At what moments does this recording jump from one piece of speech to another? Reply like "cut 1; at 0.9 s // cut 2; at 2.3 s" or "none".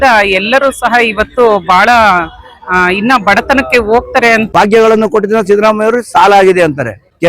cut 1; at 4.5 s